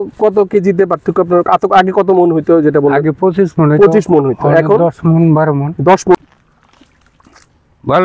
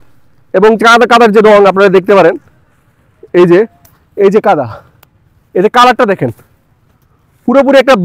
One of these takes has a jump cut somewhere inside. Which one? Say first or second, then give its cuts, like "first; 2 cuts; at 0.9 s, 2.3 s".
first; 1 cut; at 6.2 s